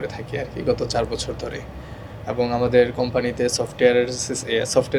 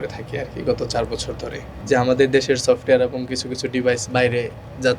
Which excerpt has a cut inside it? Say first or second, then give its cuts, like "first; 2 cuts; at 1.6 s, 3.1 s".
second; 1 cut; at 1.8 s